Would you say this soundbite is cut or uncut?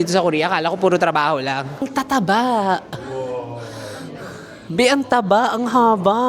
cut